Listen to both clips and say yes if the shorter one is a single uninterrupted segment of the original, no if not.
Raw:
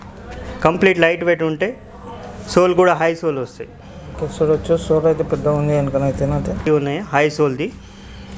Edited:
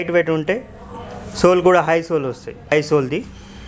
no